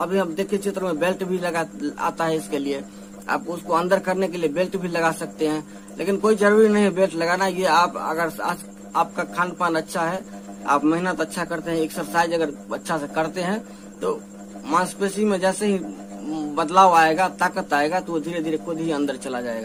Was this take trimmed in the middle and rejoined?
no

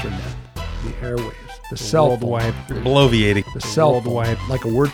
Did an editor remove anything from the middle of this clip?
no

